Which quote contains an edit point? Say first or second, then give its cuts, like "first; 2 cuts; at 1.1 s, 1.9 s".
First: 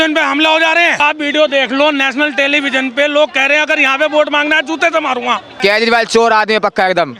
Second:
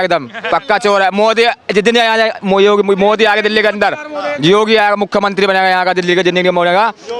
first; 2 cuts; at 1.0 s, 5.5 s